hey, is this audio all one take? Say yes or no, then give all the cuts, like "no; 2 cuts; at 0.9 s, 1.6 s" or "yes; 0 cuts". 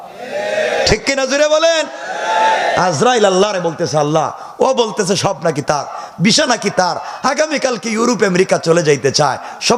yes; 0 cuts